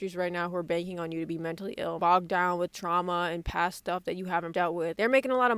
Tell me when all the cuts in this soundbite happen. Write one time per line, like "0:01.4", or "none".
0:02.0
0:04.6